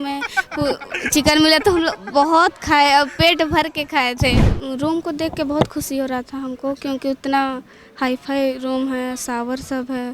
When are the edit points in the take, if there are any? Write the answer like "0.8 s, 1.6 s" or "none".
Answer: 4.4 s